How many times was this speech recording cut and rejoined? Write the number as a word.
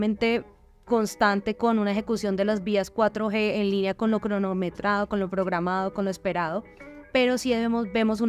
zero